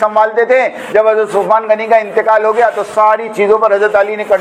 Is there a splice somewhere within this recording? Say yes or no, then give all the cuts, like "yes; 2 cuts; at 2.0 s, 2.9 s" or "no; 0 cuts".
no; 0 cuts